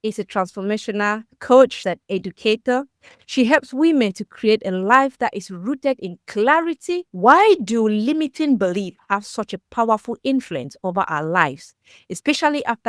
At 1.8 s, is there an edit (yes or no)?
yes